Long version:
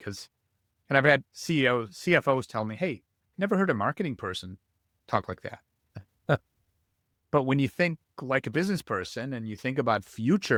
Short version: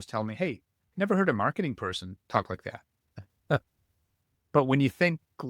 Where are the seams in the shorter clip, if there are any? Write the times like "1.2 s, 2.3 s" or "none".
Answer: 2.1 s

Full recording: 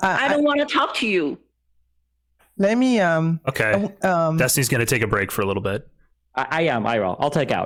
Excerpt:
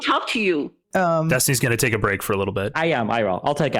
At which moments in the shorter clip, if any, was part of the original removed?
0.8 s, 2.7 s

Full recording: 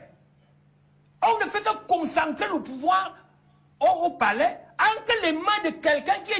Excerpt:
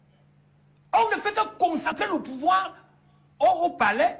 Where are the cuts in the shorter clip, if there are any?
1.8 s

